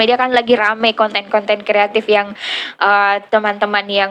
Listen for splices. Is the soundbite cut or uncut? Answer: uncut